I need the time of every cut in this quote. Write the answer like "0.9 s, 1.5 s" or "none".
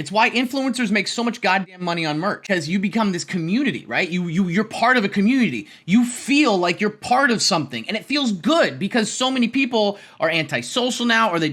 2.4 s